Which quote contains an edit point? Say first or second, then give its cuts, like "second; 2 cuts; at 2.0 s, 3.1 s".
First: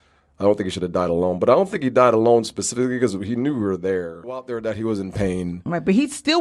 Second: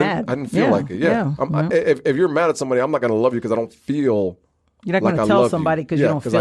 first; 1 cut; at 4.5 s